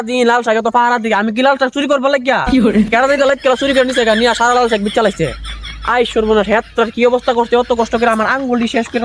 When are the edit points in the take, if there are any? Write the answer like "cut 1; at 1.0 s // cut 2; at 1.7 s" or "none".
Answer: none